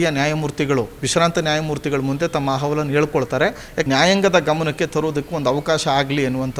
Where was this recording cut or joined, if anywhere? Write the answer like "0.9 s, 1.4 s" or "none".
3.8 s